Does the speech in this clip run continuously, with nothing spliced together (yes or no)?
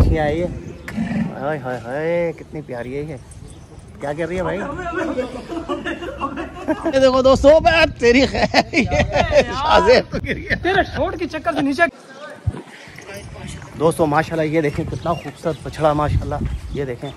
yes